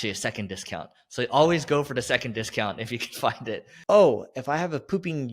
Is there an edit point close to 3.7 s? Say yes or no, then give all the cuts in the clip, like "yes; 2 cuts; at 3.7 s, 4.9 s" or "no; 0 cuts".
yes; 1 cut; at 3.7 s